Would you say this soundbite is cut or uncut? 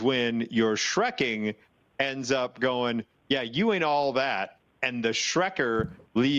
uncut